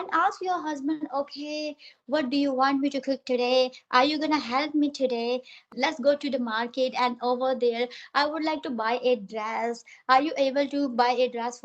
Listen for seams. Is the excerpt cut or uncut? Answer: uncut